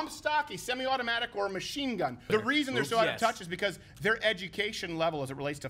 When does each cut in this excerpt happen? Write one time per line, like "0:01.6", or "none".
0:02.2